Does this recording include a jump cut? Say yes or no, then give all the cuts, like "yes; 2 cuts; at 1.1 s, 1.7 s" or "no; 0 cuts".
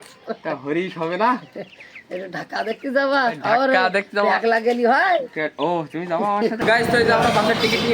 yes; 1 cut; at 6.6 s